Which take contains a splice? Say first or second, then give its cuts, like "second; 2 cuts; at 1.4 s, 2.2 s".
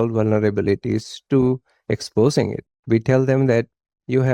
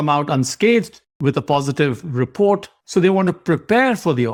first; 1 cut; at 2.7 s